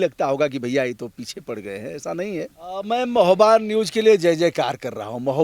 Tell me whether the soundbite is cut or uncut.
cut